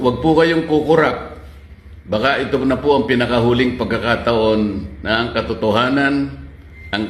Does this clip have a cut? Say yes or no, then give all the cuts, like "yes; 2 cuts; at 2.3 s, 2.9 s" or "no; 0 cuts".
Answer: no; 0 cuts